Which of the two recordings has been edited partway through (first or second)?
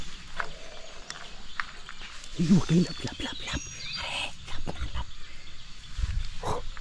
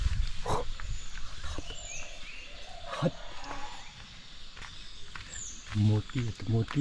second